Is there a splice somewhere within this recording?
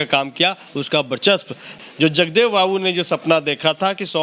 yes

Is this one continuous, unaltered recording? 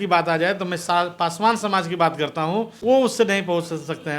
no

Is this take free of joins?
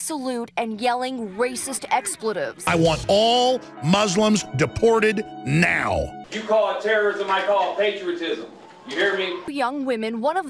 no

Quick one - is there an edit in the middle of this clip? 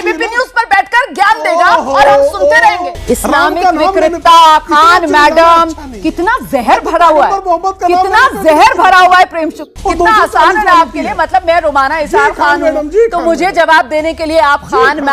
yes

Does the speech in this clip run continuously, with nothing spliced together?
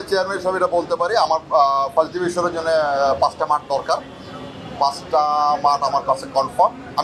yes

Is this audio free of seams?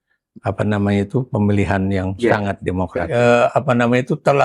no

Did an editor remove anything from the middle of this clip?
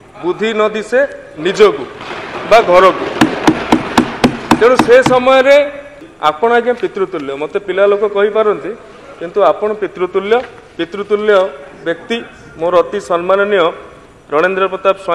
yes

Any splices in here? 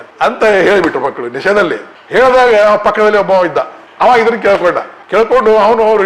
no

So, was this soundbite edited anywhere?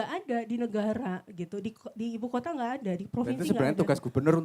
no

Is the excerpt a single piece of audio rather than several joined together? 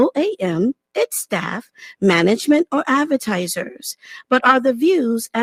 yes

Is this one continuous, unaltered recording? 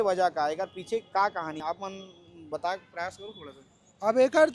yes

